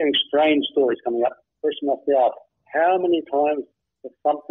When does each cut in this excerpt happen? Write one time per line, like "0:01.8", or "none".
0:01.5